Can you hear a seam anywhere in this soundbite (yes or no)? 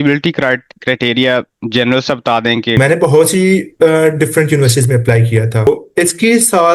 yes